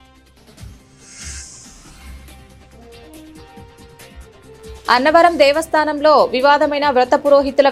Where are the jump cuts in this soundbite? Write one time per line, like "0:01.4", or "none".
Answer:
none